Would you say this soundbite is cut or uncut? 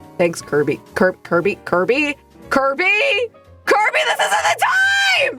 uncut